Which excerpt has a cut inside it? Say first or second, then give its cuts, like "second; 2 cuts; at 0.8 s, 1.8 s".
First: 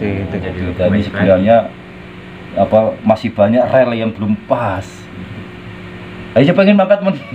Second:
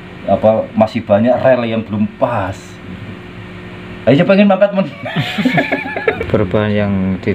second; 1 cut; at 6.2 s